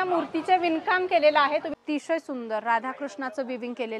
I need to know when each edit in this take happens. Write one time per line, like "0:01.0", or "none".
0:01.7